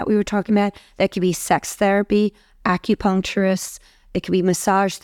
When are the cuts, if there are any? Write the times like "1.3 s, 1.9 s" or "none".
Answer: none